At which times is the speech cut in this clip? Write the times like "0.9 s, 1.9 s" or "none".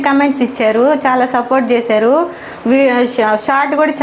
none